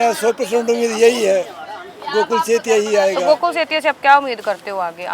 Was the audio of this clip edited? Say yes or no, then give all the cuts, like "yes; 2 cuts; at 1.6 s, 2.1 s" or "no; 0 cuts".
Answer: no; 0 cuts